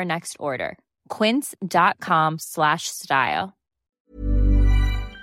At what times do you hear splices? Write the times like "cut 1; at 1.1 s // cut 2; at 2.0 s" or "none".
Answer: cut 1; at 4.0 s